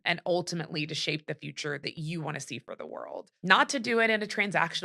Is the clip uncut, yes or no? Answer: no